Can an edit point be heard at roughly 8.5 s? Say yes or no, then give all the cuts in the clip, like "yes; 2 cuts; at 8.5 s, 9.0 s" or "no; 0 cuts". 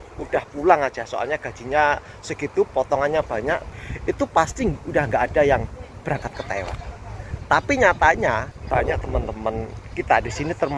yes; 2 cuts; at 3.6 s, 8.5 s